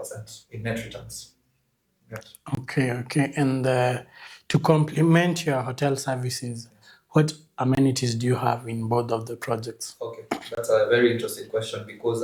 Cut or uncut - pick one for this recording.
uncut